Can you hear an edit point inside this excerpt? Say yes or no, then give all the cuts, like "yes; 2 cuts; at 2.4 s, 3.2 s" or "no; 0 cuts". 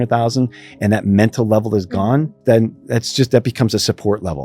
yes; 1 cut; at 2.4 s